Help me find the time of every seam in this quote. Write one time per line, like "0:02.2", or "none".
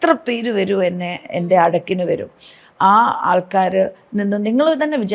none